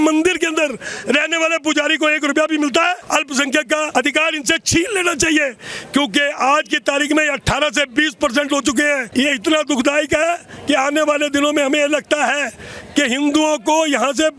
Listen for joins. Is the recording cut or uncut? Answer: cut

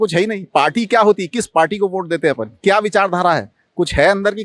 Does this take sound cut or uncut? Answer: uncut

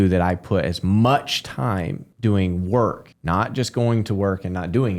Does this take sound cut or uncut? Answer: cut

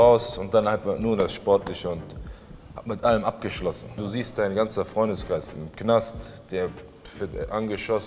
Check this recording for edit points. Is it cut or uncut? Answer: cut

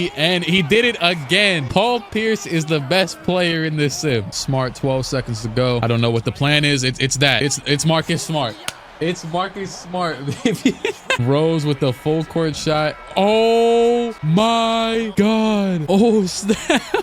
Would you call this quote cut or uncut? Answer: cut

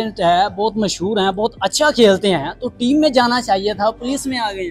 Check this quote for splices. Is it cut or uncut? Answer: uncut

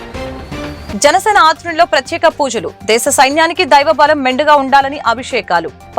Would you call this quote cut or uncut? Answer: cut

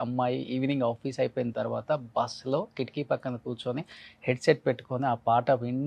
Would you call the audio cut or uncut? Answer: uncut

